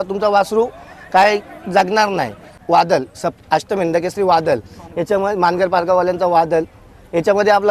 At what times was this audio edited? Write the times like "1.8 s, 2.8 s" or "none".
2.5 s